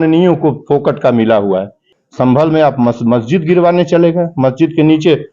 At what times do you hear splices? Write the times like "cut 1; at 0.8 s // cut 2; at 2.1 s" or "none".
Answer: cut 1; at 1.9 s